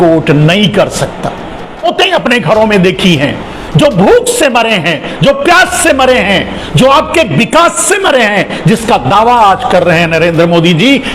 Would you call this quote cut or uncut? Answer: cut